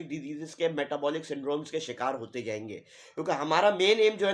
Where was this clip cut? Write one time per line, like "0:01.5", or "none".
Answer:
none